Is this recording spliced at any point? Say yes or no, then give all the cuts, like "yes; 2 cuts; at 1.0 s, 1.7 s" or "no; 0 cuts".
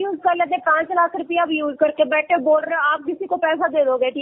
no; 0 cuts